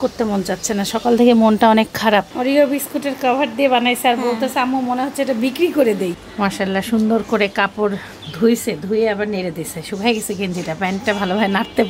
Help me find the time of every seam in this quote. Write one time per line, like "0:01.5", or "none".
0:02.3
0:06.1